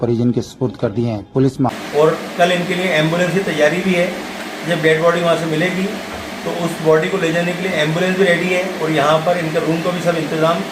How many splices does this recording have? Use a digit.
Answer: 1